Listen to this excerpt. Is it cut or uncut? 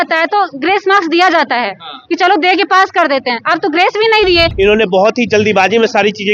cut